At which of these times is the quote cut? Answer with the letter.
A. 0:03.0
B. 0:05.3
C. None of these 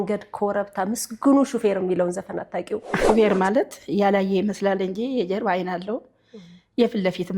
A